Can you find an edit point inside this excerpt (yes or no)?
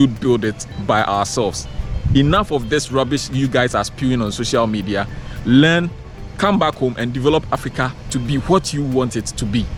no